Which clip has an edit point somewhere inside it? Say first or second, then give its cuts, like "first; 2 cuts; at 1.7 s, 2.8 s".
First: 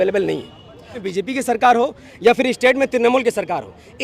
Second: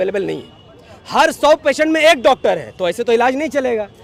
first; 1 cut; at 1.0 s